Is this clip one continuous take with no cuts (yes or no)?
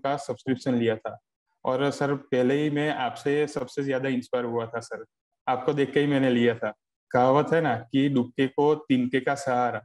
no